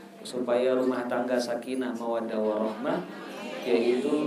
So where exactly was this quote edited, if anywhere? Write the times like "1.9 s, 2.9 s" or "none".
none